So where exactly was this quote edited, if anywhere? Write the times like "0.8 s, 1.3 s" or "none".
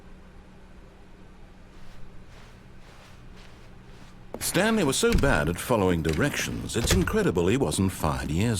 4.5 s